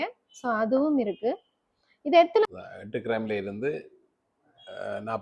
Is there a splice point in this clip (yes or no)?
yes